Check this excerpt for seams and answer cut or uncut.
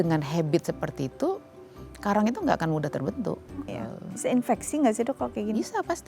cut